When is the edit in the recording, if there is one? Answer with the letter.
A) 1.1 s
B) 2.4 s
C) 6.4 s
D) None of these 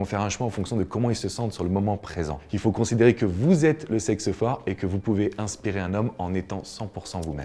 B